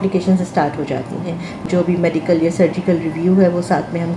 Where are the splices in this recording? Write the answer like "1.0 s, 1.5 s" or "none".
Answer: 1.7 s